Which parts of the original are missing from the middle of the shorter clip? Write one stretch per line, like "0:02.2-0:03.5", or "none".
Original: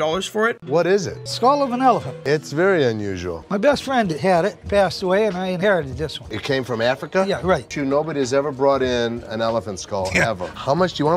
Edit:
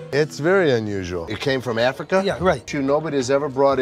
0:03.3-0:06.2